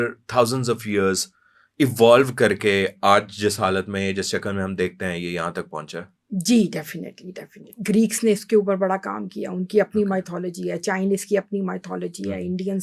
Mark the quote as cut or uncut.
cut